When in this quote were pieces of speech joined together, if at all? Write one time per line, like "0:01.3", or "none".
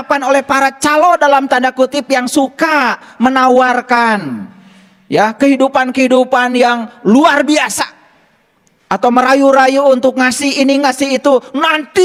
none